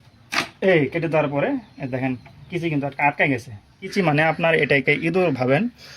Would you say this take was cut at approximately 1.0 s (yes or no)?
no